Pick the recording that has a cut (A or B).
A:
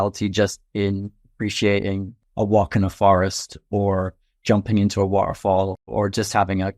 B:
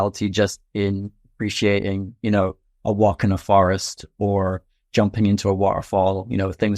A